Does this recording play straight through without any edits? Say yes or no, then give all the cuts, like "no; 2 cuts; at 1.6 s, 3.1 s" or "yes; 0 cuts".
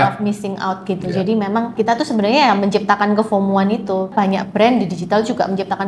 no; 2 cuts; at 1.7 s, 4.1 s